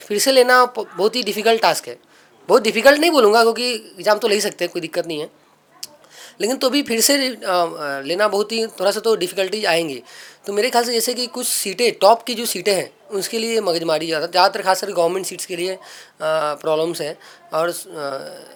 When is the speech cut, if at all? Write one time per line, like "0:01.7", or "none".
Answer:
none

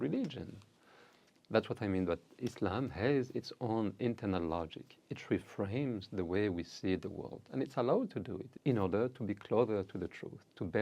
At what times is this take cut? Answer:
0:08.4

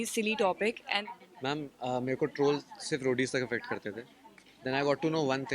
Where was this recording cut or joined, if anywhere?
0:01.0

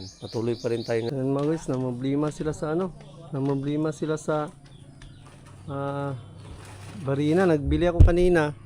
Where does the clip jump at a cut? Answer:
0:01.1

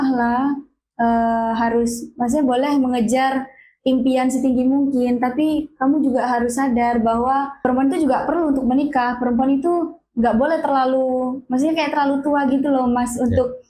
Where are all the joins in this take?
0:07.6

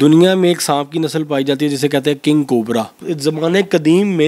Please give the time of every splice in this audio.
0:03.0

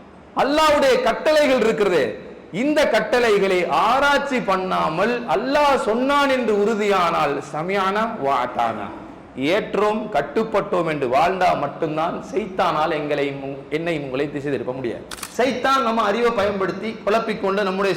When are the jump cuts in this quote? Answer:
0:15.1

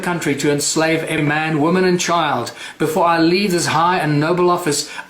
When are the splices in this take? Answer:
0:01.2

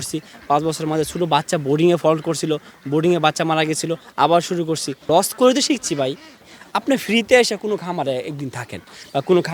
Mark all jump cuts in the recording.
0:04.9
0:06.5

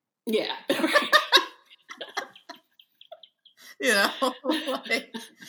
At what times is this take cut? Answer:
0:00.9

